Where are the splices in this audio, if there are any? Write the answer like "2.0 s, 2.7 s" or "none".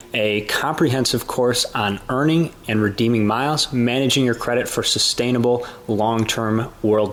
none